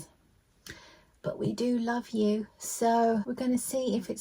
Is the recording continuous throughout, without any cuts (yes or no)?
no